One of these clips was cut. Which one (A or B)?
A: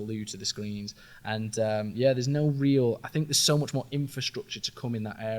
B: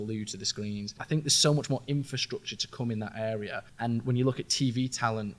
B